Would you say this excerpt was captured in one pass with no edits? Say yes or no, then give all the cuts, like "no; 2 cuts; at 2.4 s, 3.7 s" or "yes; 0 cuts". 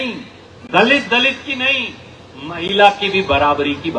yes; 0 cuts